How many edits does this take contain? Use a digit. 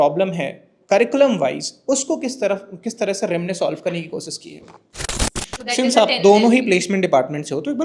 1